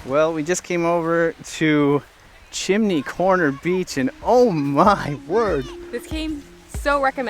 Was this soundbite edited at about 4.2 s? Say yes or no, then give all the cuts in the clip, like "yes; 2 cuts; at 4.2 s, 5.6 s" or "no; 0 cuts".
no; 1 cut; at 6.1 s